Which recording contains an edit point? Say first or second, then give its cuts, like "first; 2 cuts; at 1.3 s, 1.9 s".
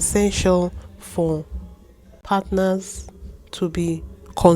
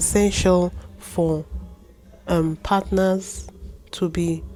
first; 1 cut; at 2.2 s